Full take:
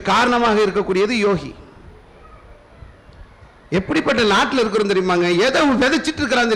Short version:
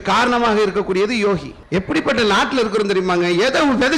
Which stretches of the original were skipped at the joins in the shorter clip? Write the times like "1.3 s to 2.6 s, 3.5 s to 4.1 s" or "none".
1.5 s to 3.5 s